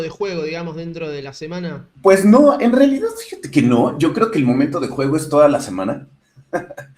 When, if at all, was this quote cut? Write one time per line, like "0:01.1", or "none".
0:01.9